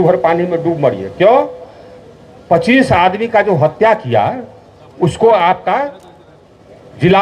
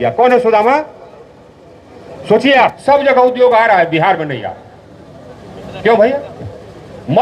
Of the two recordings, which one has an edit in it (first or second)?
second